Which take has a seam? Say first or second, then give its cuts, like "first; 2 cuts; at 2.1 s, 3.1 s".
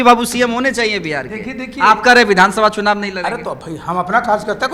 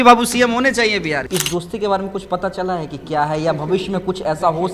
second; 1 cut; at 1.2 s